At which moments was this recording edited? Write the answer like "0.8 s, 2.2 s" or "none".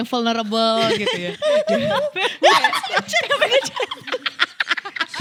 none